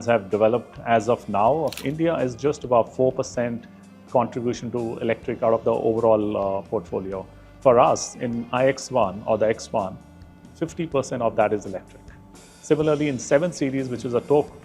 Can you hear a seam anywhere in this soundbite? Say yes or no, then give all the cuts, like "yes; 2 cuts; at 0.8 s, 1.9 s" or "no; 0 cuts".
yes; 1 cut; at 1.8 s